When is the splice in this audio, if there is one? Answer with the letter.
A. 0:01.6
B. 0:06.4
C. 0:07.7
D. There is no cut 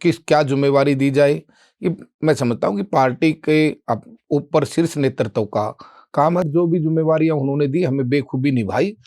D